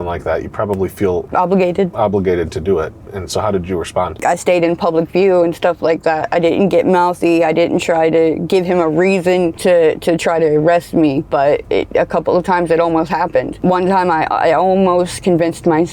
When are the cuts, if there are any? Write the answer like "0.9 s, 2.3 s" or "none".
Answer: 1.3 s, 4.2 s, 9.6 s, 13.5 s